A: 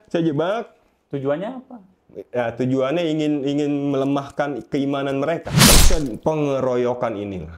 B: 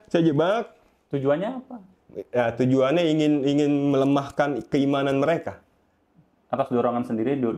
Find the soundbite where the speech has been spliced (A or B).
A